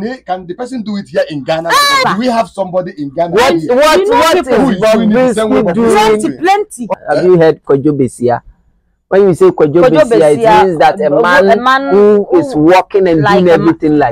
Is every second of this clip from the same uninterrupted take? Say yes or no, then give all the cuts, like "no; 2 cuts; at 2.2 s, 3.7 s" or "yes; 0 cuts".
no; 2 cuts; at 2.0 s, 6.9 s